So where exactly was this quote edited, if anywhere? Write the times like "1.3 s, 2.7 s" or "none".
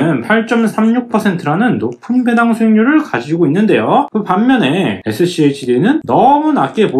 none